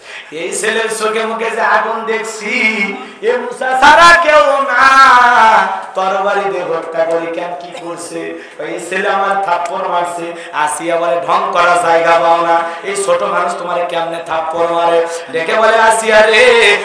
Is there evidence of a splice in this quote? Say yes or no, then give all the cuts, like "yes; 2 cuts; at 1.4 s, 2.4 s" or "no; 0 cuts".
no; 0 cuts